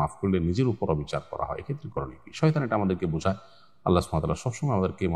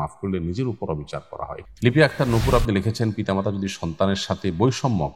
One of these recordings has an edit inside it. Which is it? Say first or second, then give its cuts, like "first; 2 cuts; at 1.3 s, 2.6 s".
second; 1 cut; at 1.6 s